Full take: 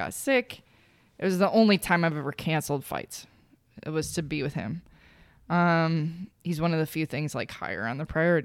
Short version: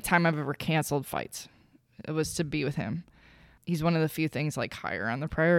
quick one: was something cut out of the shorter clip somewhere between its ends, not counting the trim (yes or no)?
yes